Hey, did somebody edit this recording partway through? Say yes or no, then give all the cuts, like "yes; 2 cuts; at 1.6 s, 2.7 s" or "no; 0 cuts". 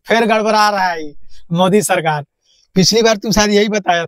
no; 0 cuts